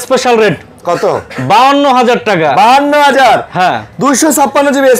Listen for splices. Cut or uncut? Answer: uncut